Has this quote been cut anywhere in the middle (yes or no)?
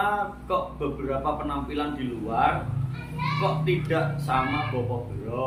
no